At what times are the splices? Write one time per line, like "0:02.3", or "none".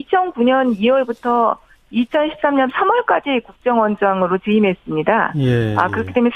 none

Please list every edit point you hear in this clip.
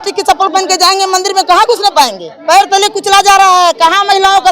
0:02.3

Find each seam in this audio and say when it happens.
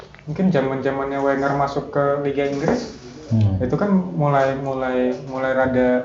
none

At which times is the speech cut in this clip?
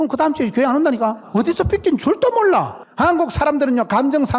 0:01.2
0:02.8

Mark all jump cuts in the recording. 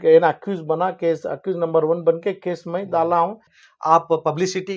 0:03.5

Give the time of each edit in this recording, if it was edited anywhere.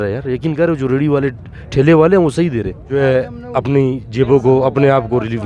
0:02.9

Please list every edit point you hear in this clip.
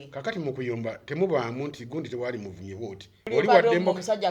0:03.3

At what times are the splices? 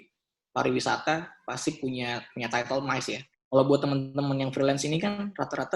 0:03.3

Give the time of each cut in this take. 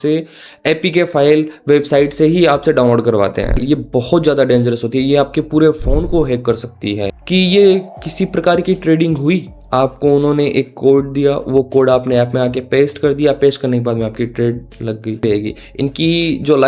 0:03.6
0:07.1
0:15.2

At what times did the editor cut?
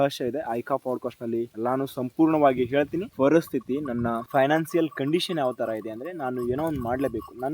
0:03.1

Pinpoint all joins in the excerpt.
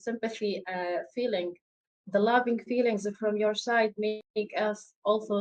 none

